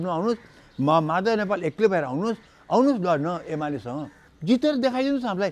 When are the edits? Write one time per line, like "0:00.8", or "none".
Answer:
0:04.2

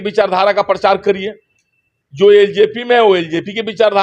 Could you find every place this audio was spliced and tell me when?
none

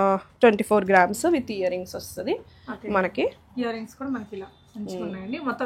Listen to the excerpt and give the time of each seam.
none

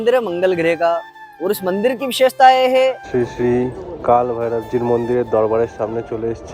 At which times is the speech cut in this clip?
0:03.0

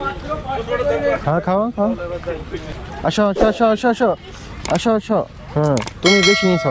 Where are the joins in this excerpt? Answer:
0:02.6

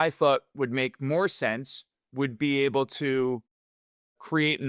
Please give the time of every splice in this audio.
none

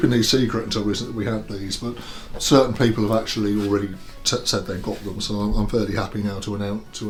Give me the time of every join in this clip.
none

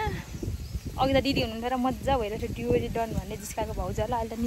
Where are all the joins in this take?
none

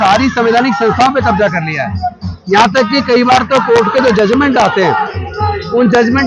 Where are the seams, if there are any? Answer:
none

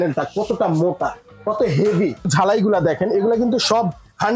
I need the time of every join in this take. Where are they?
0:02.2

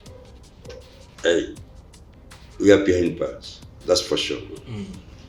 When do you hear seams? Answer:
none

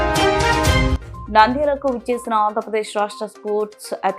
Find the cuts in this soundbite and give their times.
0:00.9

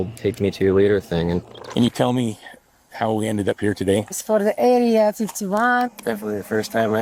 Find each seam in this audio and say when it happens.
0:01.4
0:04.2
0:05.9

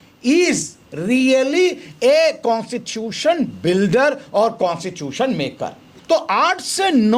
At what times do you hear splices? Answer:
0:05.9

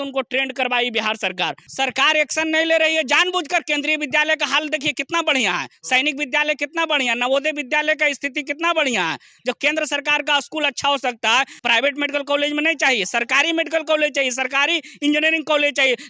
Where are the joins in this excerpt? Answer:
0:01.6
0:11.6

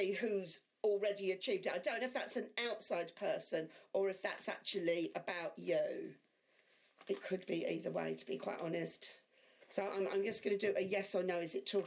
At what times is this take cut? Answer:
none

